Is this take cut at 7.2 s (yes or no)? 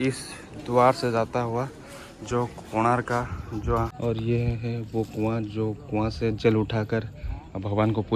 no